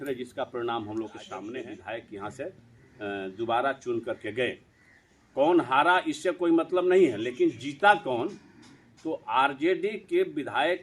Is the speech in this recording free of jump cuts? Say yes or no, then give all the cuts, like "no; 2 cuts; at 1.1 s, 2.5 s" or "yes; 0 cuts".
no; 1 cut; at 1.5 s